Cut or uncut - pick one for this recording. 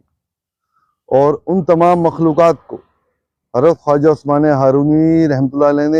uncut